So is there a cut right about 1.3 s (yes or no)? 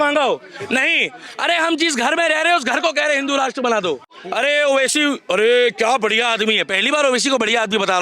no